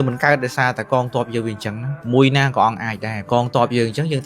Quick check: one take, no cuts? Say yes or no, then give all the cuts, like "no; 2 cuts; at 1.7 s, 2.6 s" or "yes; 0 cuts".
no; 1 cut; at 3.2 s